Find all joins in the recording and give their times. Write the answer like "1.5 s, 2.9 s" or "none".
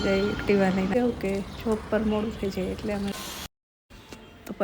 0.9 s, 3.1 s